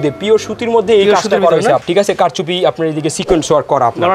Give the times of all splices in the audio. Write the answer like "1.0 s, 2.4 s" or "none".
1.8 s